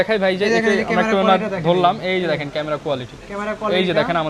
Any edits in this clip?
no; 0 cuts

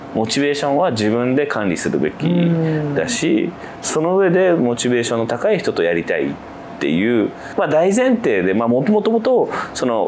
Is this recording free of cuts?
yes; 0 cuts

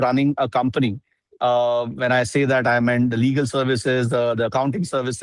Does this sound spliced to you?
no; 0 cuts

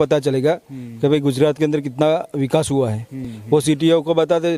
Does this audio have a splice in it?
no; 0 cuts

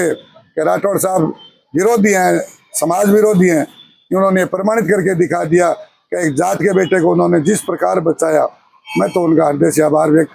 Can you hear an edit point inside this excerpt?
no; 0 cuts

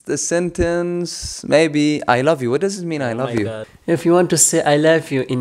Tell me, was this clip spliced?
yes; 1 cut; at 3.6 s

